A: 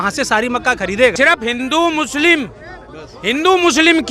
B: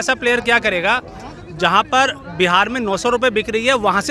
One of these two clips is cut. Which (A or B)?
A